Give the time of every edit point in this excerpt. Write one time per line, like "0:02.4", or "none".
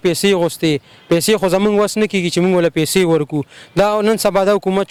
none